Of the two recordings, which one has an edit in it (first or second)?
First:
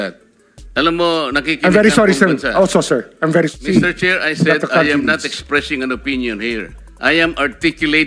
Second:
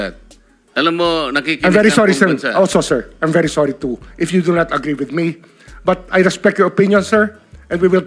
first